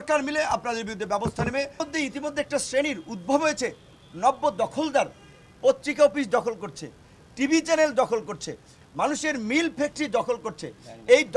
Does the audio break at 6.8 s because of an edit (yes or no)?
no